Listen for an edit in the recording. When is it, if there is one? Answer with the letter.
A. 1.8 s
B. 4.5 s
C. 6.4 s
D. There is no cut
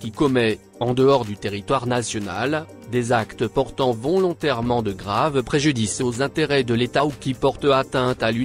D